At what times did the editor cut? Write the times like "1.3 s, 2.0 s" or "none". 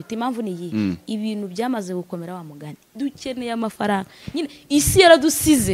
2.8 s